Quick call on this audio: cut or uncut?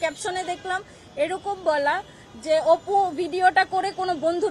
uncut